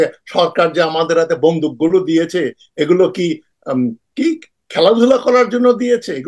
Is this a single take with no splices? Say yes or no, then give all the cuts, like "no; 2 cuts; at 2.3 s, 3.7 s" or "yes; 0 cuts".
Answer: yes; 0 cuts